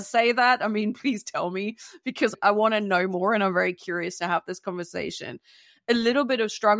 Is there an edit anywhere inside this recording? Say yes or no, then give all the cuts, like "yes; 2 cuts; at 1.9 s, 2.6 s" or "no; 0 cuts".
yes; 1 cut; at 2.3 s